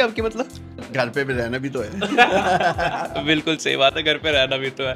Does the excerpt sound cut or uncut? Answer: uncut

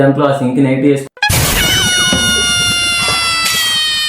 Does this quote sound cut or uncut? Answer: cut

